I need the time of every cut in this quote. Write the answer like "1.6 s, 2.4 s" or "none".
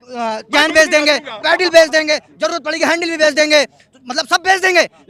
none